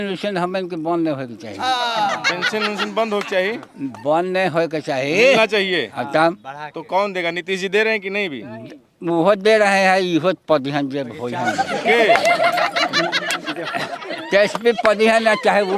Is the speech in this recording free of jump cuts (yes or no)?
yes